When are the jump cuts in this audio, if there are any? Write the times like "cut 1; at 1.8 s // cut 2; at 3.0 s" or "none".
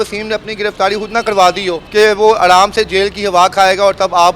cut 1; at 1.8 s